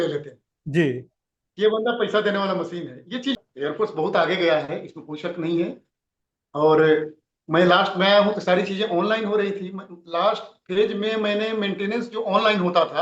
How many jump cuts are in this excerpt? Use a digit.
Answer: 1